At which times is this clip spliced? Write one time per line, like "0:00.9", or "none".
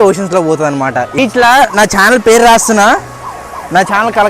0:01.2